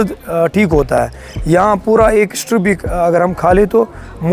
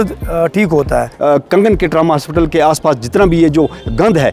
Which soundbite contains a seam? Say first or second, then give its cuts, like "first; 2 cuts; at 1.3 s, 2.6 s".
second; 1 cut; at 1.0 s